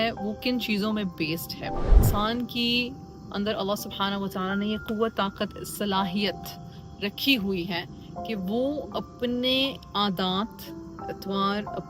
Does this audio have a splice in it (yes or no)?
yes